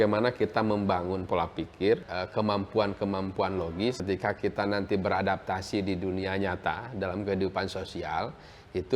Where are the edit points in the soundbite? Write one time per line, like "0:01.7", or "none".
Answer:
0:02.1
0:04.0